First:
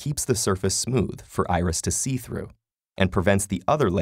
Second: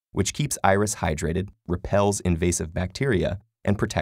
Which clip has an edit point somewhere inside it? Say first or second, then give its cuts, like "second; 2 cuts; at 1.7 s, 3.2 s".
first; 1 cut; at 2.8 s